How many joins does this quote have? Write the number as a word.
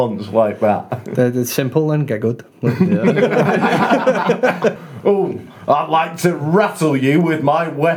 one